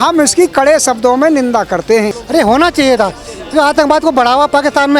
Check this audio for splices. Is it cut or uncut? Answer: cut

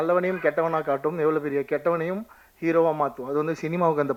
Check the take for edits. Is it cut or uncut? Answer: uncut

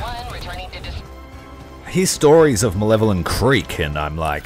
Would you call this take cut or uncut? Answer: cut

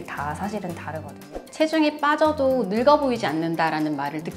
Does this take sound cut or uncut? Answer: cut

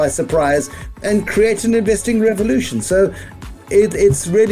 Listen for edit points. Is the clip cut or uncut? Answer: uncut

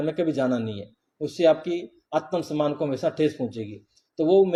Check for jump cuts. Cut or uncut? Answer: uncut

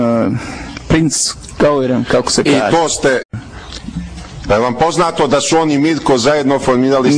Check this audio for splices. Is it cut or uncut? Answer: uncut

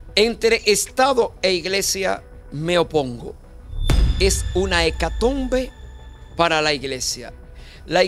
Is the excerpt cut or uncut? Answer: uncut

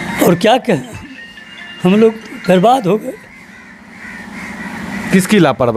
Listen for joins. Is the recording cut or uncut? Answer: uncut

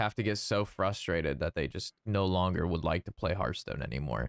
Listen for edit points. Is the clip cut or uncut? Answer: uncut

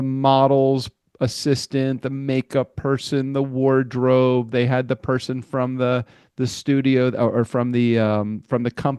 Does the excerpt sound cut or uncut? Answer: uncut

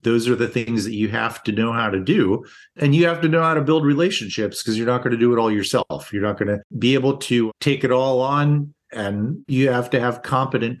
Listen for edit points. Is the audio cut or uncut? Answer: cut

